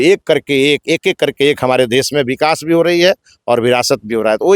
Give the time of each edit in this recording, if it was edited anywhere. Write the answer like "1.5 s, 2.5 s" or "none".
none